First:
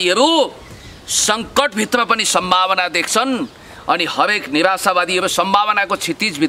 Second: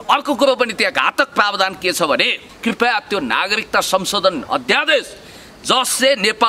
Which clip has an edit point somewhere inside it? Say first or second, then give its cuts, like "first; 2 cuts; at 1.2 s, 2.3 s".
second; 1 cut; at 2.4 s